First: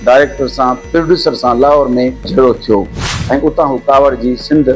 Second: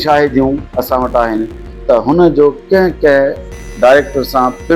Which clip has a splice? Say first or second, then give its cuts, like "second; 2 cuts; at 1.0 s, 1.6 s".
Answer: first; 1 cut; at 3.1 s